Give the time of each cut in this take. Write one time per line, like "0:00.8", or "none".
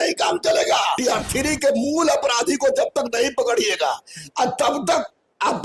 0:01.0